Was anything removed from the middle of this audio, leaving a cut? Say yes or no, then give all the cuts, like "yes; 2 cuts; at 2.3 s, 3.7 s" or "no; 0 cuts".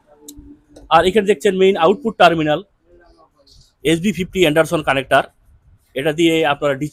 no; 0 cuts